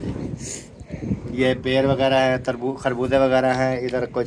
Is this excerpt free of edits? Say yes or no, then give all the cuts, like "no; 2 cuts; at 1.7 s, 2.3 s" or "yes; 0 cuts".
yes; 0 cuts